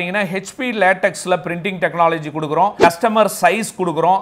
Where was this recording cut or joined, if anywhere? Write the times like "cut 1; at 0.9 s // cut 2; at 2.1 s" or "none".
cut 1; at 2.8 s